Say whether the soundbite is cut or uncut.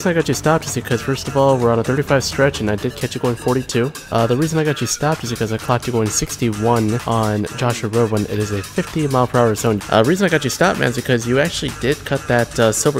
cut